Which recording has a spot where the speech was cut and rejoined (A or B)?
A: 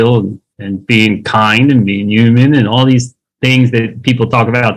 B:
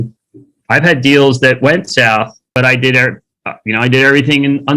B